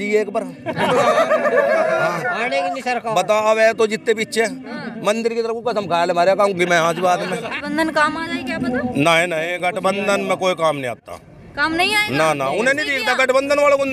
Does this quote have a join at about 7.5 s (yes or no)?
yes